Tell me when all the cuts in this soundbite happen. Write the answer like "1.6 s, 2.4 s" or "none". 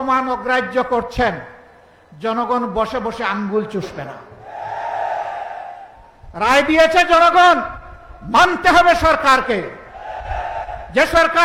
none